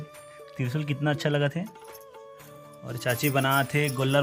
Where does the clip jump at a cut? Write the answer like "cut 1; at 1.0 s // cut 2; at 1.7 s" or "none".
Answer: none